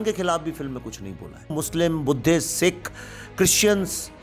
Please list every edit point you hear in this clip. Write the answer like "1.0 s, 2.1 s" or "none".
1.6 s